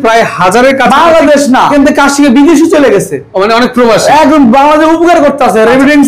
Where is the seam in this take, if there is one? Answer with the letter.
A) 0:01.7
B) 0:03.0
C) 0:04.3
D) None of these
A